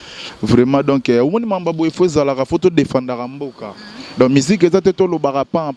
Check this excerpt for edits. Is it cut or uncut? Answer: uncut